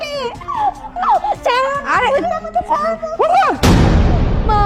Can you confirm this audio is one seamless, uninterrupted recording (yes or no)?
yes